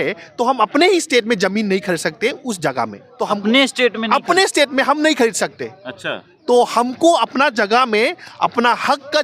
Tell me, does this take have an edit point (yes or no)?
yes